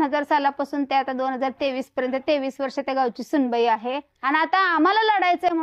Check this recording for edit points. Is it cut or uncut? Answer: cut